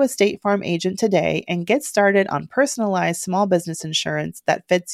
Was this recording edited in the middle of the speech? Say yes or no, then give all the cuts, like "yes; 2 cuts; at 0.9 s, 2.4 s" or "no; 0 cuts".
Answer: no; 0 cuts